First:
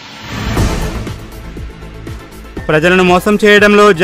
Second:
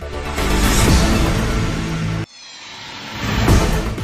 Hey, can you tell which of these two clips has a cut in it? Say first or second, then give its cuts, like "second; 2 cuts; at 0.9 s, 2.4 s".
first; 1 cut; at 2.6 s